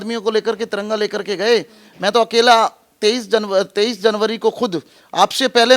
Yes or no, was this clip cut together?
no